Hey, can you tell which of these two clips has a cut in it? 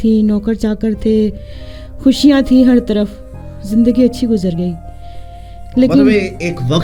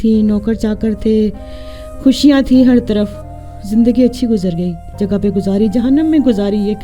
second; 1 cut; at 4.9 s

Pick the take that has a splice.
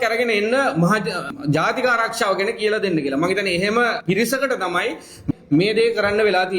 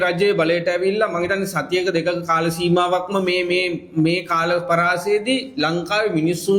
first; 3 cuts; at 1.4 s, 4.0 s, 5.2 s

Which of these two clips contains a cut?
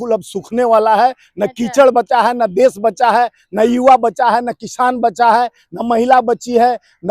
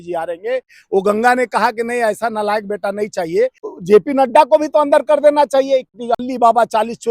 second; 2 cuts; at 3.7 s, 5.9 s

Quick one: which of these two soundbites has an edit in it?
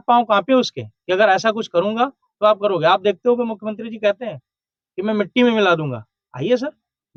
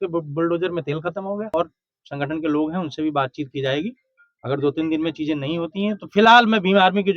second; 1 cut; at 1.5 s

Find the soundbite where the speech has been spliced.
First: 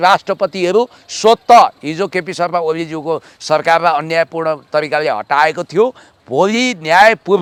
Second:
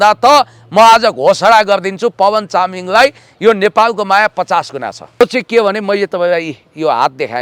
second; 1 cut; at 5.2 s

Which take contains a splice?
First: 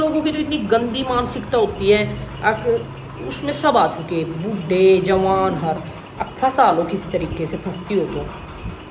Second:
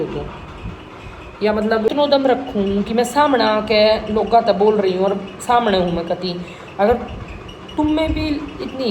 second; 1 cut; at 1.9 s

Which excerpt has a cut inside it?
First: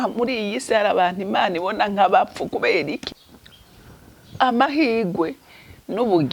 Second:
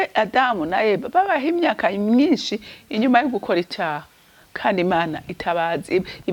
first; 1 cut; at 3.0 s

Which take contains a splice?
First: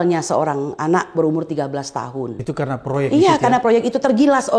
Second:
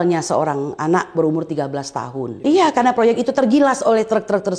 second; 1 cut; at 2.4 s

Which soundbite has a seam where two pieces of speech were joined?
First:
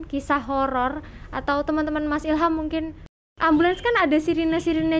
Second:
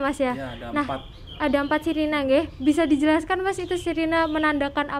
first; 1 cut; at 3.2 s

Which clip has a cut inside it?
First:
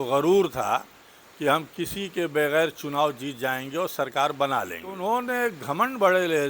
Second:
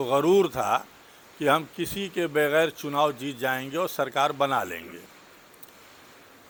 first; 1 cut; at 5.0 s

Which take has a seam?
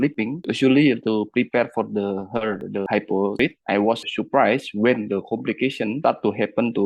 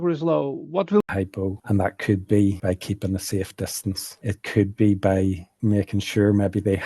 second; 1 cut; at 1.0 s

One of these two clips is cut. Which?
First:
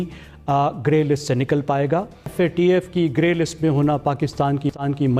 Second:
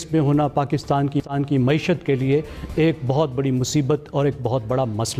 first; 1 cut; at 2.3 s

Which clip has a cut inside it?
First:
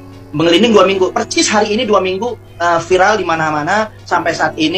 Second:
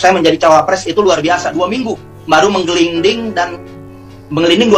second; 1 cut; at 2.1 s

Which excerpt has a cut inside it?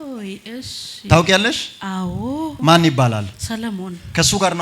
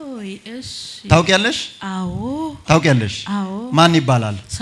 first; 1 cut; at 2.5 s

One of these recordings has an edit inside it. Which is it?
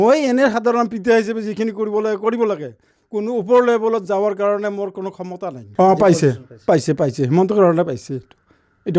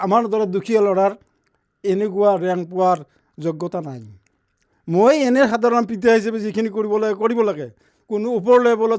first; 1 cut; at 5.6 s

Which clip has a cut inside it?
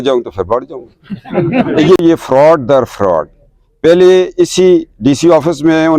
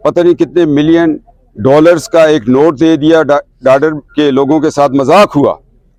first; 1 cut; at 2.0 s

